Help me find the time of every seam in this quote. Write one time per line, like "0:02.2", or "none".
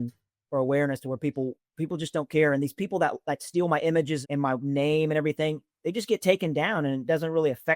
0:04.2